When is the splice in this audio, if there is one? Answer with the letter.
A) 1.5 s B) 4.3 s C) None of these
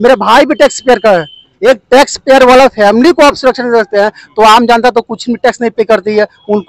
A